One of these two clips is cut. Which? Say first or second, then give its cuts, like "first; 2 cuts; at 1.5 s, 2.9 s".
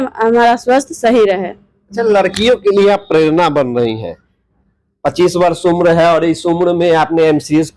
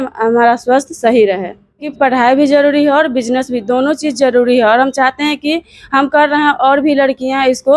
second; 1 cut; at 1.9 s